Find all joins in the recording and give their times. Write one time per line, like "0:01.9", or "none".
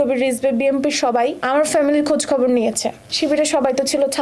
0:01.4
0:03.0